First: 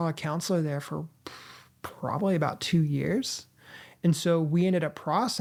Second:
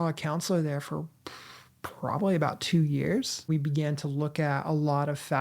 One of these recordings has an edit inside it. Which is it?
second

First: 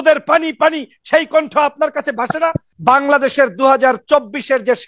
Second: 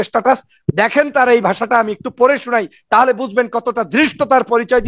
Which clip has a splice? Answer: first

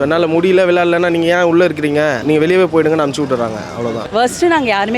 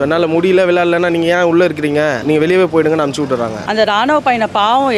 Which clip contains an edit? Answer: second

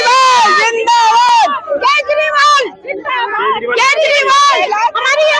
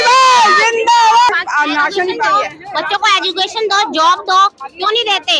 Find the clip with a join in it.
second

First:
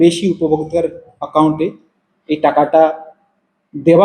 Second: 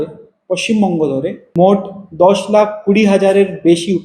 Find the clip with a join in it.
second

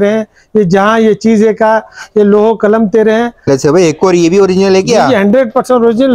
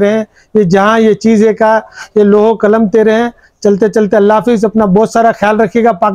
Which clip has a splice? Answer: first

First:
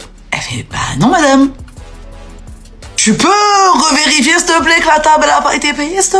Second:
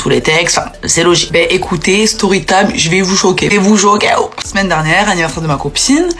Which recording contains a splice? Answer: second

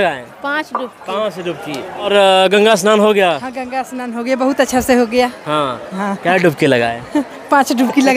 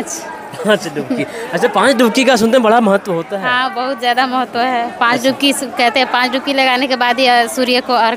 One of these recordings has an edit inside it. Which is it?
first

